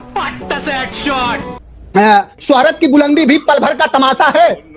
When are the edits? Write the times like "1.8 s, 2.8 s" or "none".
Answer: 1.6 s

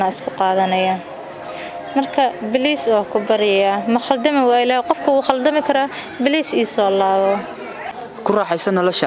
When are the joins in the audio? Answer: 7.7 s

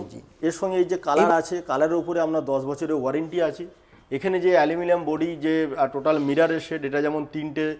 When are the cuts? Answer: none

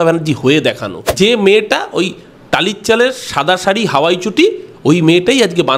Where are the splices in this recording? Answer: 1.0 s

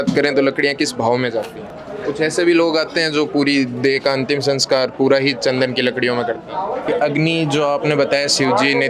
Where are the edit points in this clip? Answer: 1.6 s, 6.9 s

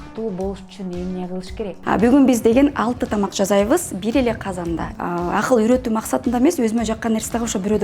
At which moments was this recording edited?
1.8 s, 4.9 s

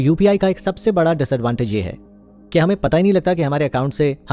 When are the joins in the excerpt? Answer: none

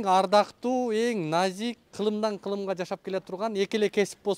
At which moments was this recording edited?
1.9 s

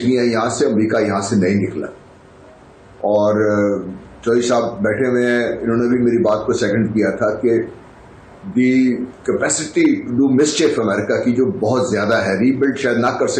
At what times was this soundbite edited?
none

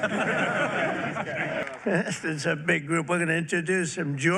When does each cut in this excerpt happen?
1.7 s

